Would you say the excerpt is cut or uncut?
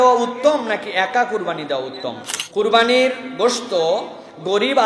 cut